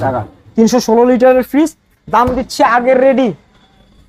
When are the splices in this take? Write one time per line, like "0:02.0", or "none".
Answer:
none